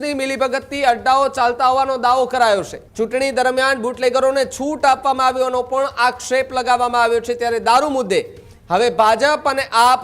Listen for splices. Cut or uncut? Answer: cut